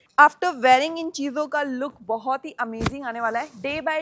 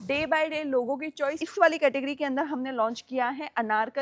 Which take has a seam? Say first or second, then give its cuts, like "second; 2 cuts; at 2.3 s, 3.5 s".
second; 1 cut; at 1.4 s